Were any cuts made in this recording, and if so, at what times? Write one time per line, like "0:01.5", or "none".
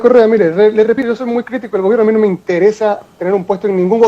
0:01.0

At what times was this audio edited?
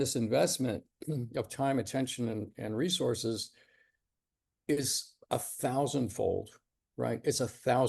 none

